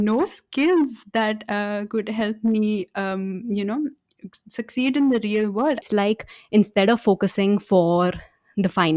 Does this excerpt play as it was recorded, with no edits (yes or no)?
no